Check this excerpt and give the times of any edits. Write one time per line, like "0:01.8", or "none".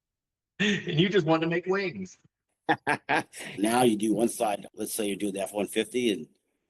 0:03.4